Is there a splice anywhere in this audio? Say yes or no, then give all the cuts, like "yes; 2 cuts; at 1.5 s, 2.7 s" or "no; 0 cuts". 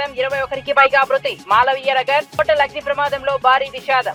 no; 0 cuts